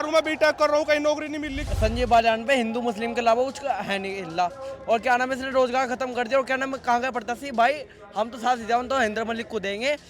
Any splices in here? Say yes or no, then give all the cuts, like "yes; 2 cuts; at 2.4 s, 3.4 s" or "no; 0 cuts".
yes; 1 cut; at 1.6 s